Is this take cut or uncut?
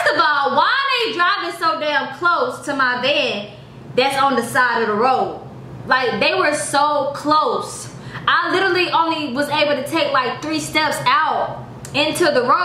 uncut